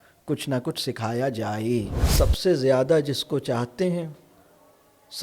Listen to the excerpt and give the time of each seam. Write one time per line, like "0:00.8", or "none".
0:02.0